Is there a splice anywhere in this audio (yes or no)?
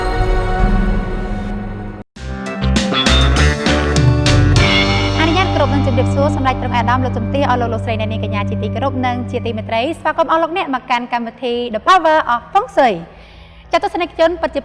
no